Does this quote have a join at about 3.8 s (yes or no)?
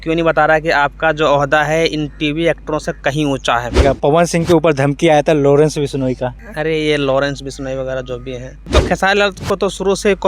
yes